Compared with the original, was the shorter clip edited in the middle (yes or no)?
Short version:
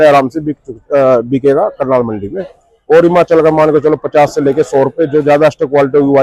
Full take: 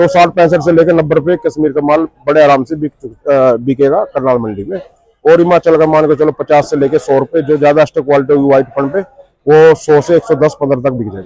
no